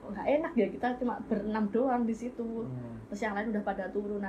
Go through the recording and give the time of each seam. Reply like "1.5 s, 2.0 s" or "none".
none